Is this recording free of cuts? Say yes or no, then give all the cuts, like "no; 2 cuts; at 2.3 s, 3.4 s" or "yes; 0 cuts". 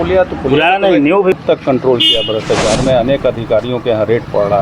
no; 1 cut; at 1.4 s